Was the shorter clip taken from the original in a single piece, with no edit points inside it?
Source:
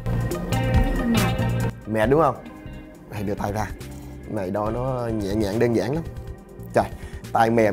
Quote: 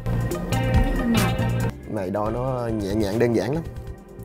no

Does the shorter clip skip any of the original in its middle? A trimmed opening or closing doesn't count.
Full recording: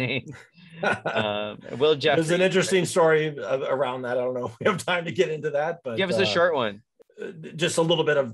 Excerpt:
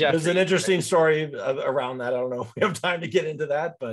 no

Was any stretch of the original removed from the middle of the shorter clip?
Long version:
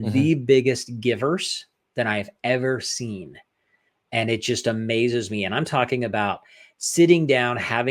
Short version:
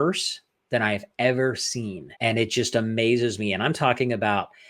yes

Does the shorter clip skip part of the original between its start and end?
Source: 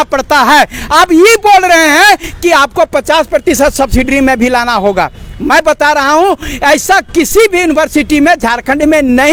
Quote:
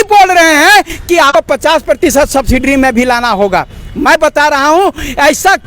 yes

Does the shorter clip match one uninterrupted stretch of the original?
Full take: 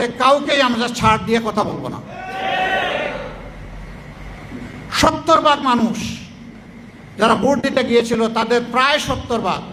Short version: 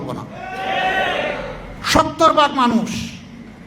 no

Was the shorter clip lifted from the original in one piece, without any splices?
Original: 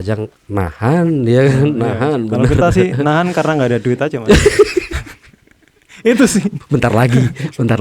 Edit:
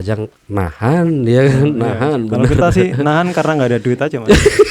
yes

